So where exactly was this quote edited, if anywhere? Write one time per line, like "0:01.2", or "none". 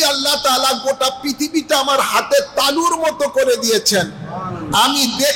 none